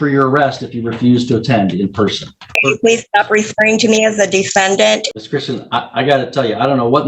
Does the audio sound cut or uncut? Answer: cut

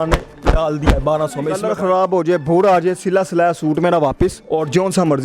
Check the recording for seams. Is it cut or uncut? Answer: cut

